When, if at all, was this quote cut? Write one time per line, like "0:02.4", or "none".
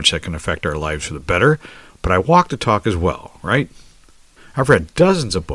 none